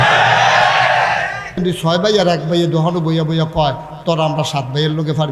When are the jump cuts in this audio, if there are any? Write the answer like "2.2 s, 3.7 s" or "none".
1.6 s